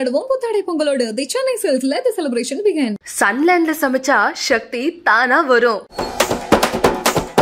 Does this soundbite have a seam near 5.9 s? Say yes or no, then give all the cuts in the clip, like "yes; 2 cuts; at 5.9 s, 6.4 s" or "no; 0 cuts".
yes; 1 cut; at 5.9 s